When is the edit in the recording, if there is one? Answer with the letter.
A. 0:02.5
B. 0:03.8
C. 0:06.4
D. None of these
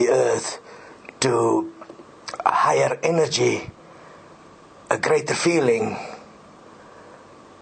C